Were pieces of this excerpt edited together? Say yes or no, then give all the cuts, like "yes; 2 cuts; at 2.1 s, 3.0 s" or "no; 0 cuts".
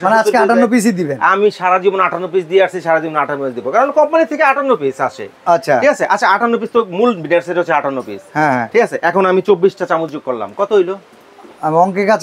no; 0 cuts